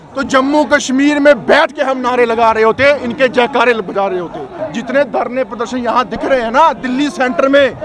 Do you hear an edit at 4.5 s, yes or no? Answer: yes